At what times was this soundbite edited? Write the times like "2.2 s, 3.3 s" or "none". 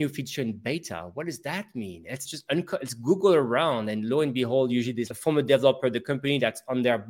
2.3 s, 5.1 s

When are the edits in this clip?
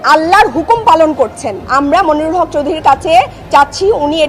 1.6 s

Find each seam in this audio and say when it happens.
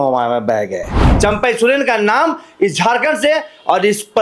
1.1 s

